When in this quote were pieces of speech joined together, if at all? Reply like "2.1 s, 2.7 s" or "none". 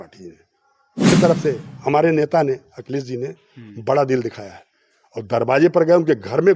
1.1 s